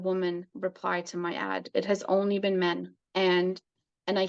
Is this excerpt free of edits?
no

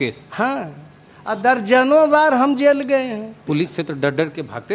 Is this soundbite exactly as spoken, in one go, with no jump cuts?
no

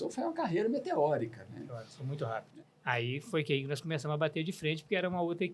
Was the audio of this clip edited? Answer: yes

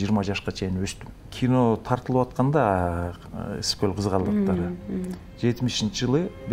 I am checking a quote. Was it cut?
yes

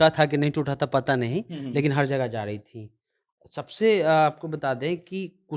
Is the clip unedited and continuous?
yes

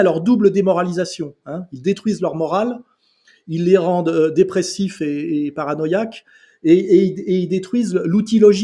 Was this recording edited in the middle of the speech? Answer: no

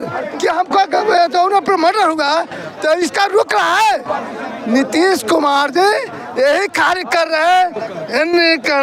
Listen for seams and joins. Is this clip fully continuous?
yes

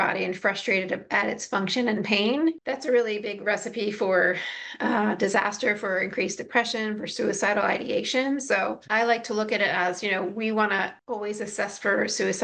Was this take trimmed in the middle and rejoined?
yes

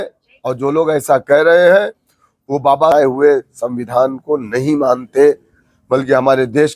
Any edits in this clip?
yes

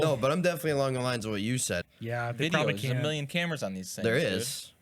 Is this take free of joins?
no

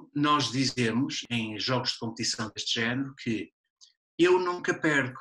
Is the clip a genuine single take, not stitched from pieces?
no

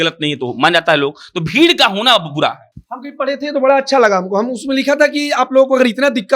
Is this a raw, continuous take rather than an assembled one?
yes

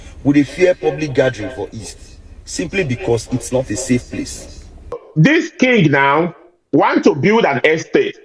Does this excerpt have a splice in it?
yes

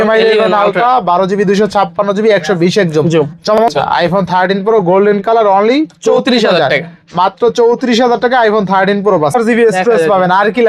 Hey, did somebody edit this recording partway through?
yes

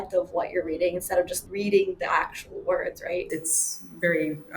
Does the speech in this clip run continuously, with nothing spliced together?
no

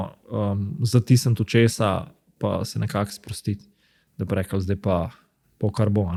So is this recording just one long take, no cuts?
yes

